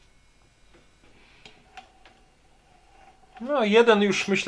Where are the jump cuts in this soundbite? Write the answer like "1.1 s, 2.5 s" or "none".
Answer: 1.1 s